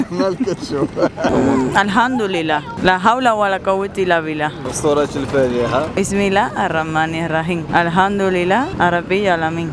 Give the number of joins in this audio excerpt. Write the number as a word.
zero